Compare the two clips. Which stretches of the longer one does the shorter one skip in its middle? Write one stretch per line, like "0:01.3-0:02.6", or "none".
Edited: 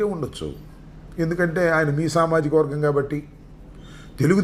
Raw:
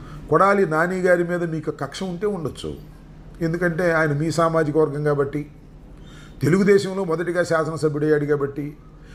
none